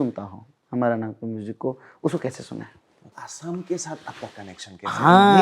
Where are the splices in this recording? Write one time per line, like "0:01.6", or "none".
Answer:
0:03.2